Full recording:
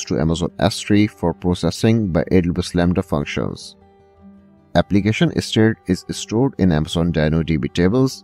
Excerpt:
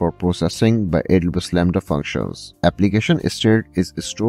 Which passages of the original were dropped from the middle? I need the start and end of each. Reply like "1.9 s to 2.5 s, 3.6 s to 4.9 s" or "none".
3.6 s to 4.5 s